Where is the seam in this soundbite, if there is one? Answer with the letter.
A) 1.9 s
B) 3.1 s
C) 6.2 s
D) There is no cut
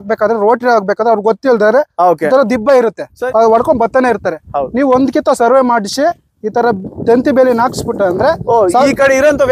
B